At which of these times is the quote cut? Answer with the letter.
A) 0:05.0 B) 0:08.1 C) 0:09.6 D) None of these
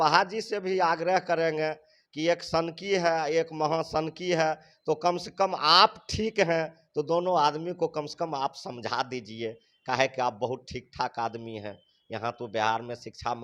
D